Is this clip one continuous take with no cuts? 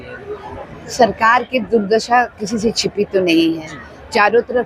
yes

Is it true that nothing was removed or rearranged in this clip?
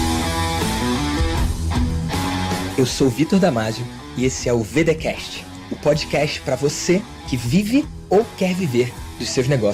yes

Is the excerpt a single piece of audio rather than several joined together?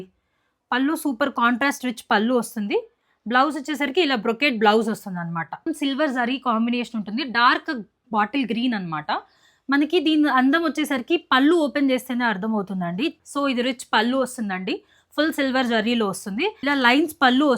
no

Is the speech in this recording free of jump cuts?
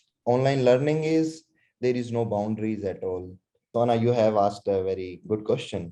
no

